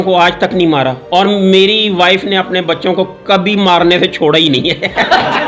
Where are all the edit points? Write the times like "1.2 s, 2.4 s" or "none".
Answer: none